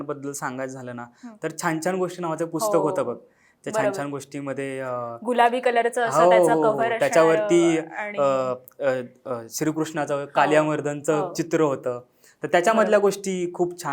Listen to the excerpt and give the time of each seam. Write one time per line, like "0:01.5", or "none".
none